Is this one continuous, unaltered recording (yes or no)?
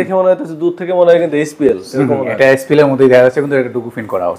yes